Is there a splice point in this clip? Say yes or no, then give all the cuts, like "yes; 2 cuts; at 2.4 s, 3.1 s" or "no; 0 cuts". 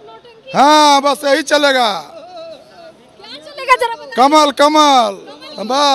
no; 0 cuts